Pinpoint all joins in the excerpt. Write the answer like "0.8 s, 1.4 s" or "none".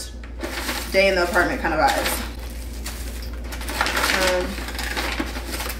none